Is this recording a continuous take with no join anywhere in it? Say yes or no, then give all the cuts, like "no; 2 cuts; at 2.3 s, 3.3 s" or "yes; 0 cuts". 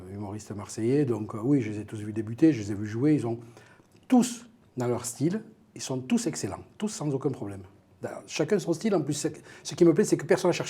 no; 1 cut; at 2.8 s